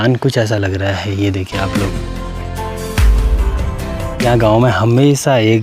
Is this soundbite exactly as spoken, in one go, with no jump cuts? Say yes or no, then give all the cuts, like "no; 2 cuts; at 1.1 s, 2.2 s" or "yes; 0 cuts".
yes; 0 cuts